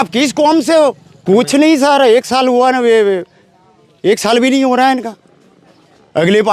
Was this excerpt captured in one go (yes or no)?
no